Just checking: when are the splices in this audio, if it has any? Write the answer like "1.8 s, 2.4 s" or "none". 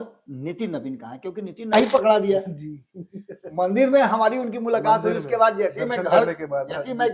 1.7 s

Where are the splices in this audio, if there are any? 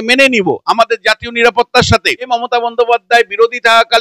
2.3 s

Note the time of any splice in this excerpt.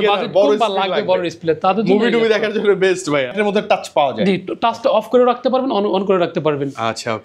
3.3 s

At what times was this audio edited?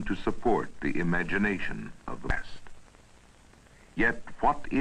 none

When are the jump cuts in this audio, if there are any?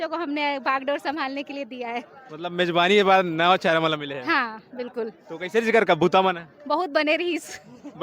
none

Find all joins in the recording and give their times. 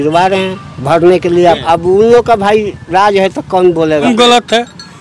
1.6 s, 4.1 s

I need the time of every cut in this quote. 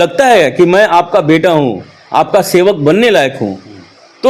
none

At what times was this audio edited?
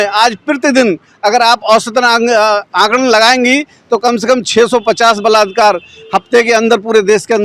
none

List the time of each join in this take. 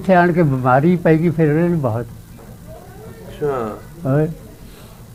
none

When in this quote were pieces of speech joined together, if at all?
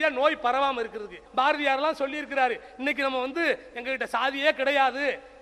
1.2 s

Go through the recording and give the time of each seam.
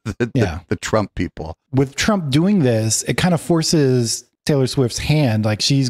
1.6 s

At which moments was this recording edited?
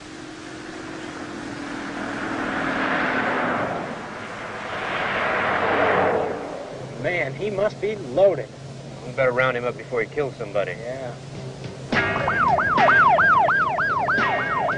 8.0 s

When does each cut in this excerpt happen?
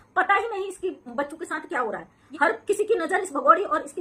2.2 s

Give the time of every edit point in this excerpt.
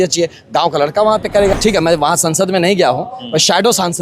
1.5 s

